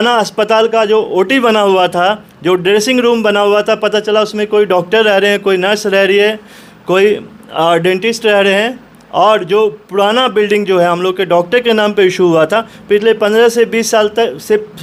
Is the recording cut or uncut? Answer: uncut